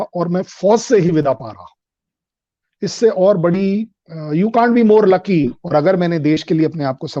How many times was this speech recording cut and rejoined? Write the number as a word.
one